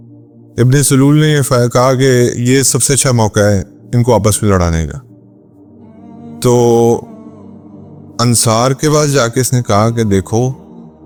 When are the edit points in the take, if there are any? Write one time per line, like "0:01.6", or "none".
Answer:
none